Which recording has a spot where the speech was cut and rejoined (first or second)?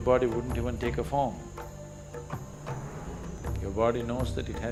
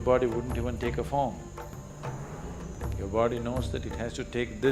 second